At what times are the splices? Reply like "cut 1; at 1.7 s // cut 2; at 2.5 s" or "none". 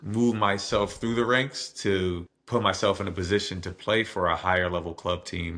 cut 1; at 2.3 s